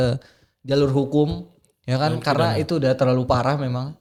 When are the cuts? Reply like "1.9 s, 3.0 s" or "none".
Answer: none